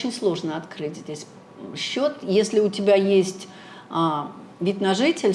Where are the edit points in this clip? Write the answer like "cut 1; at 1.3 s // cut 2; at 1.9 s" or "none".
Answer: none